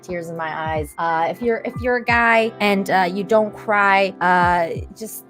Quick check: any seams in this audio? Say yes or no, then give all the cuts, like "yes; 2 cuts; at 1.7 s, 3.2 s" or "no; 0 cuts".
yes; 3 cuts; at 0.9 s, 2.5 s, 4.1 s